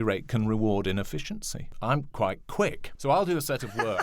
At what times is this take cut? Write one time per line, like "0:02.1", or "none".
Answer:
0:01.7
0:02.9